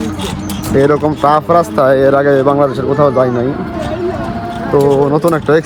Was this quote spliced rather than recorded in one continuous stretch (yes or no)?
no